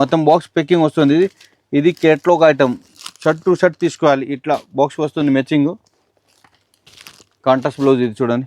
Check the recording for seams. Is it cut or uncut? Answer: uncut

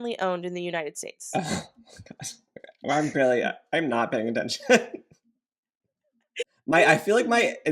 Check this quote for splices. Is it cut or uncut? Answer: cut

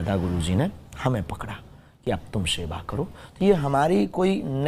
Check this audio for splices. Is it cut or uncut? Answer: uncut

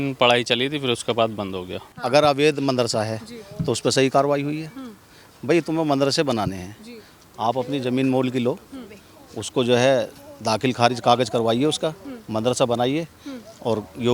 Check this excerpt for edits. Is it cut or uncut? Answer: cut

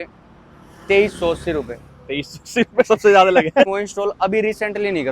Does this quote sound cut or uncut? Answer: cut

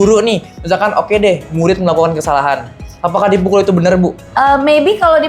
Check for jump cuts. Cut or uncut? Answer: cut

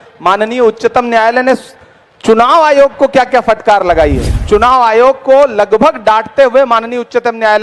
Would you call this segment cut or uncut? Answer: cut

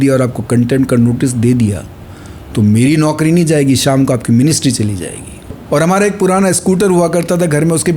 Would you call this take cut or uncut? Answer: cut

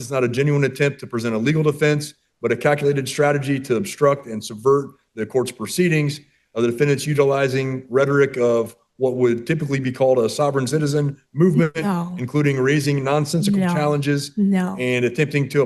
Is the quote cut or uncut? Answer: uncut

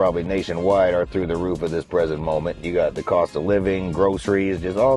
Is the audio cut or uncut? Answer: cut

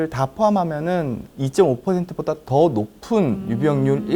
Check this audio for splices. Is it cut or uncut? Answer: cut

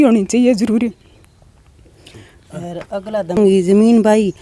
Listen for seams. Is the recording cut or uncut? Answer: uncut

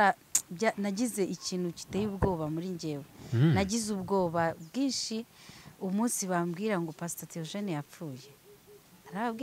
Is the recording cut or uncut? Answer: uncut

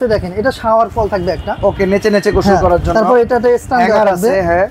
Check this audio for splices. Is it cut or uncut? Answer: uncut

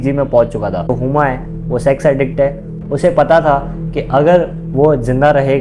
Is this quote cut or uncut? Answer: cut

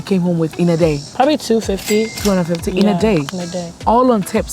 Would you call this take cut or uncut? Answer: uncut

